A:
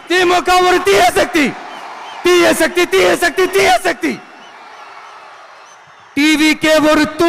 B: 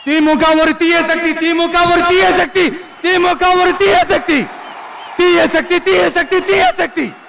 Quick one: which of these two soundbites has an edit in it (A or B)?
A